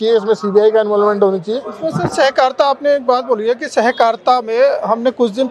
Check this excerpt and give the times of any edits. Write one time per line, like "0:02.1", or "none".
none